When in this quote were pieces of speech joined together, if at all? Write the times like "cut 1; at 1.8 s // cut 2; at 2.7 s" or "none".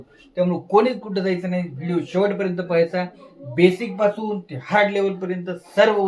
none